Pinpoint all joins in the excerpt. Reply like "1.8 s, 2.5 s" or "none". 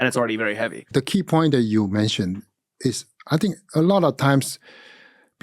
0.9 s